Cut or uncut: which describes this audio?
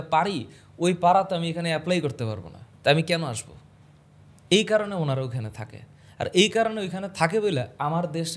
uncut